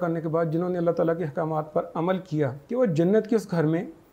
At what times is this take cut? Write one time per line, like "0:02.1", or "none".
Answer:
0:02.6